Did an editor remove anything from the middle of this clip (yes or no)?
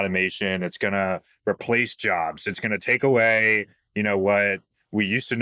no